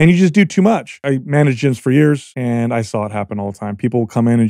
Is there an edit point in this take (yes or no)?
yes